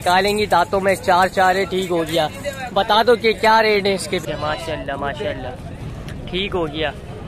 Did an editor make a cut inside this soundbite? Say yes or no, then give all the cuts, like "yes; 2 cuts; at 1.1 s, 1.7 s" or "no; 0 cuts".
yes; 1 cut; at 4.2 s